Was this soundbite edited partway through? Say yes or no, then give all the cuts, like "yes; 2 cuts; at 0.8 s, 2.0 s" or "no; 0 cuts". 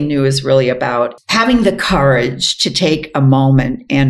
yes; 1 cut; at 1.1 s